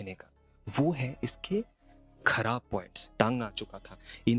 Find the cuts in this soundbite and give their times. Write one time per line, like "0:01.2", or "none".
0:03.1